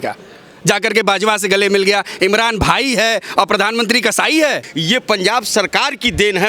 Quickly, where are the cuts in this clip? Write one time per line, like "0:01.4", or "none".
0:04.7